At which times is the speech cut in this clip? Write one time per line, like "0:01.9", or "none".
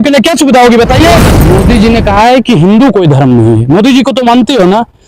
0:01.4